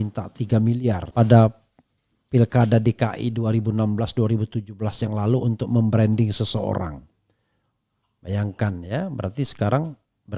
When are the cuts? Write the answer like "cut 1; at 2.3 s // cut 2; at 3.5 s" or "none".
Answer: cut 1; at 1.0 s